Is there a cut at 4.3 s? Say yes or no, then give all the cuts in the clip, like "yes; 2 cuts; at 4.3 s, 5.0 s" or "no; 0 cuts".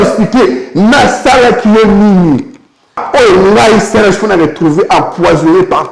no; 1 cut; at 3.0 s